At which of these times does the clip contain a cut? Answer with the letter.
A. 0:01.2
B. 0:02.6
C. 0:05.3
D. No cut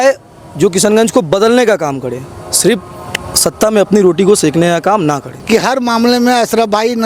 C